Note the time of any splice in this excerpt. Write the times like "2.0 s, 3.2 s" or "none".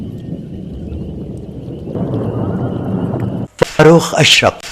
3.8 s